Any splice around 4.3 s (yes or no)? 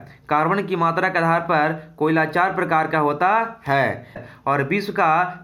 yes